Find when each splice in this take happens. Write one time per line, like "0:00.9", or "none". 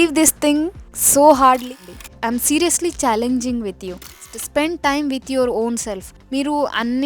0:01.7
0:04.2